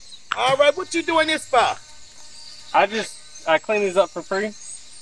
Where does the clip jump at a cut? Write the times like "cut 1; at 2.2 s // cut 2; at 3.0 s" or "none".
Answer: none